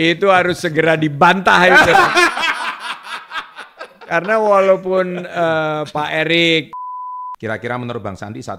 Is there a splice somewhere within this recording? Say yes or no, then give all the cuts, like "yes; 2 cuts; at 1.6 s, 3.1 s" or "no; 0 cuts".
yes; 1 cut; at 6.7 s